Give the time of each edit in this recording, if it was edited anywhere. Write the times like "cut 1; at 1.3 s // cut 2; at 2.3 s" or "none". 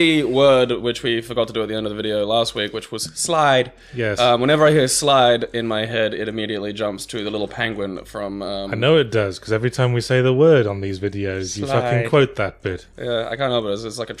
cut 1; at 12.2 s

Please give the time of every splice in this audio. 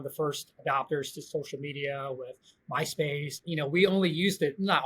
cut 1; at 3.5 s

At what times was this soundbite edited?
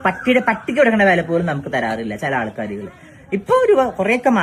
none

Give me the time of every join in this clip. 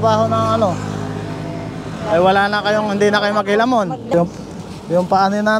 cut 1; at 4.1 s

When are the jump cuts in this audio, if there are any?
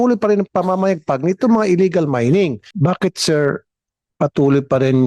cut 1; at 2.6 s

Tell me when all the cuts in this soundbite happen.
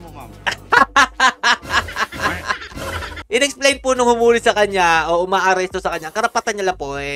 none

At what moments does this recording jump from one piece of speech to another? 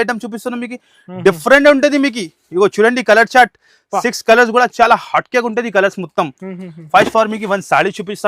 none

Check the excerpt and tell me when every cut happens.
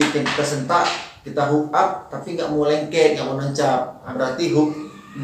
cut 1; at 4.1 s

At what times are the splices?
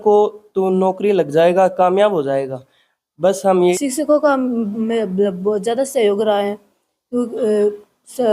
cut 1; at 3.7 s

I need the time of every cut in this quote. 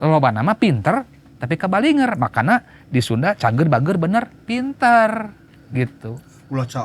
none

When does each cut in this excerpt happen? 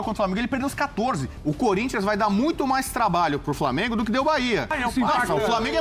cut 1; at 1.3 s // cut 2; at 4.8 s

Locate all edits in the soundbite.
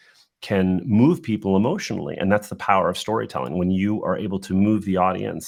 none

